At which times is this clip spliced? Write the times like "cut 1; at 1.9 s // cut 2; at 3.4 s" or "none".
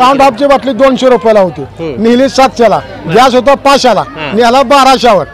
none